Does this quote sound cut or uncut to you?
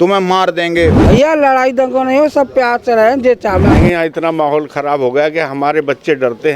cut